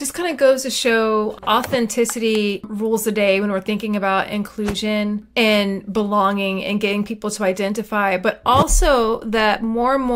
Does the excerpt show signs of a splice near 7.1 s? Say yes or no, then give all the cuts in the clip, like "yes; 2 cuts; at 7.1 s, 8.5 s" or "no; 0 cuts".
no; 3 cuts; at 1.4 s, 2.7 s, 5.2 s